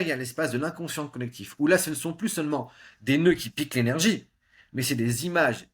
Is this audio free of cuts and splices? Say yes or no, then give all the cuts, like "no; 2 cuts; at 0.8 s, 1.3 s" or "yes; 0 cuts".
yes; 0 cuts